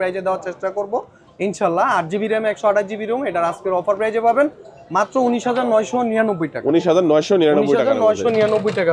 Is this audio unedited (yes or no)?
yes